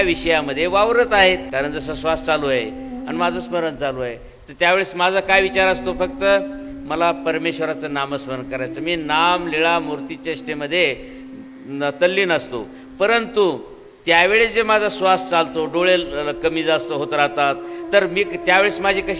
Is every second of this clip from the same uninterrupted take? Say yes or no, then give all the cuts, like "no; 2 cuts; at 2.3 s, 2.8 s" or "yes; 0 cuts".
no; 1 cut; at 1.5 s